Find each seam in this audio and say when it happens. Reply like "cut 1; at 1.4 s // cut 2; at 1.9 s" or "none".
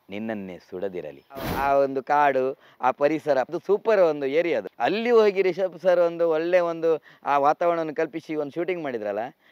cut 1; at 1.5 s // cut 2; at 3.5 s // cut 3; at 4.7 s